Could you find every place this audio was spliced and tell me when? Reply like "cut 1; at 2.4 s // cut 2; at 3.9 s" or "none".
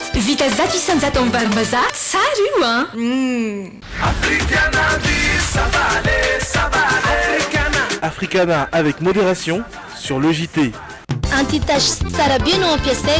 cut 1; at 3.8 s // cut 2; at 11.0 s